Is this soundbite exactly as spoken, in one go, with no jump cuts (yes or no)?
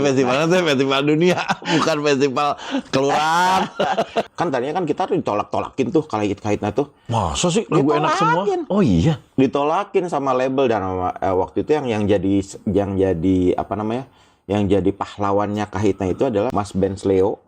no